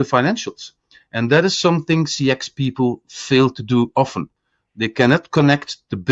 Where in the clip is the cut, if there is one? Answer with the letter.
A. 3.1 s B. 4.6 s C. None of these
C